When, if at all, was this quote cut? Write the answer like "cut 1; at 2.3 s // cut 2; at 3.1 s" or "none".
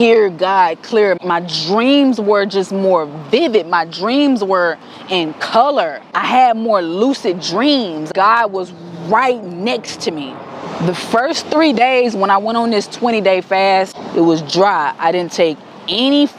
cut 1; at 1.2 s // cut 2; at 6.0 s // cut 3; at 8.1 s // cut 4; at 10.8 s // cut 5; at 14.0 s